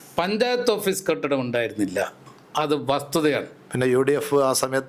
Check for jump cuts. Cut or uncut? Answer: uncut